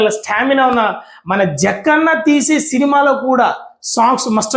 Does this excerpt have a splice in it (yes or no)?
no